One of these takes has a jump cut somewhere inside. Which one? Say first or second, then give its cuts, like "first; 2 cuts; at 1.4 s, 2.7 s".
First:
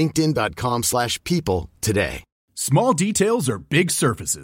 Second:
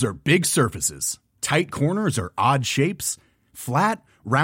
first; 1 cut; at 2.3 s